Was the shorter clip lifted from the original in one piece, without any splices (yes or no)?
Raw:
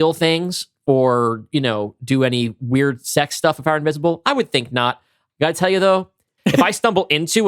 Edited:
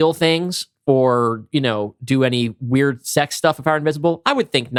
yes